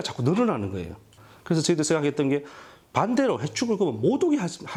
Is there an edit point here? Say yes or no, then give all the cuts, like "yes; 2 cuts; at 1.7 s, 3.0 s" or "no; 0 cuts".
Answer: no; 0 cuts